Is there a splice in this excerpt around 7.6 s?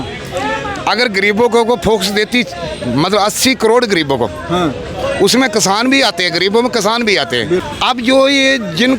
yes; 1 cut; at 7.6 s

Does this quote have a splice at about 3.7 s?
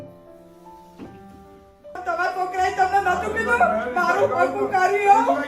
no; 1 cut; at 2.0 s

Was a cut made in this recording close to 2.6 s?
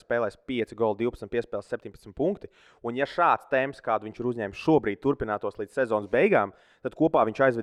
no; 0 cuts

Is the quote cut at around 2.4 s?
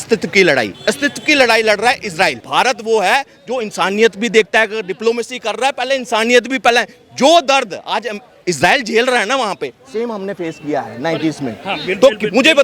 yes; 1 cut; at 2.4 s

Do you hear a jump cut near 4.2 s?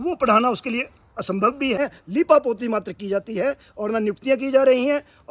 no; 1 cut; at 1.8 s

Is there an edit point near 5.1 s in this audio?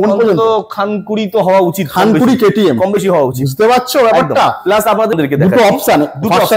yes; 1 cut; at 5.1 s

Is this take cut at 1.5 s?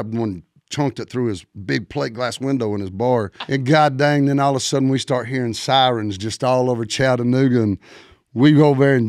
no; 1 cut; at 3.4 s

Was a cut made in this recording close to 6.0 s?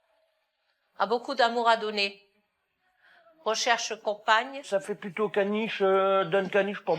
no; 1 cut; at 4.6 s

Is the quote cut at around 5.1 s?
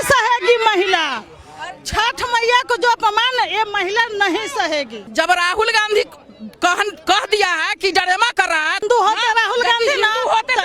yes; 2 cuts; at 5.1 s, 8.8 s

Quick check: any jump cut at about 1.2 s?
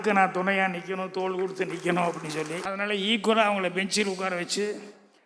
no; 1 cut; at 2.6 s

